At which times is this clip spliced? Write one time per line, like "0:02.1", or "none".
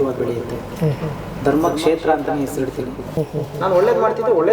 0:03.0